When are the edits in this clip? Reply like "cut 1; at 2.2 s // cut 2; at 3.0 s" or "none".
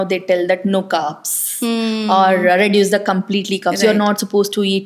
none